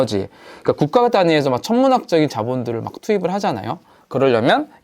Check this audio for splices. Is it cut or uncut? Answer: cut